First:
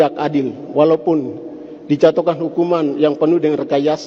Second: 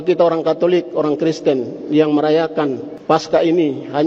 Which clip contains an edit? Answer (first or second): second